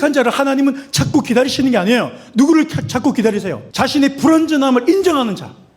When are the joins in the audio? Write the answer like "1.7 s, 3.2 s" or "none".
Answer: 3.6 s